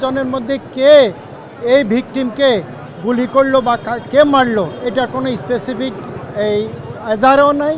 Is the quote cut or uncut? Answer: uncut